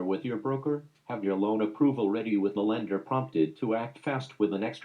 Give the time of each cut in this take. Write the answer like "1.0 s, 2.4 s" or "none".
0.9 s